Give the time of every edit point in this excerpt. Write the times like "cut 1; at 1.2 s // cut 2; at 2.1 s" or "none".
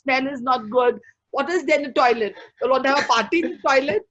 none